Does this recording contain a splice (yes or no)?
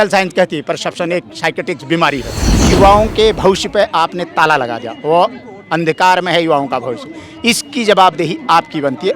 yes